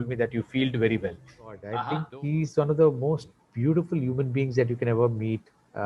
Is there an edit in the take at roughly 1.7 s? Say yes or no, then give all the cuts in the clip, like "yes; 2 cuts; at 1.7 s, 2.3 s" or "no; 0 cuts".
yes; 1 cut; at 1.7 s